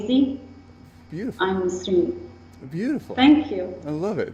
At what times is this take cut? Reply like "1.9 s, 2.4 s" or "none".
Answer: 3.3 s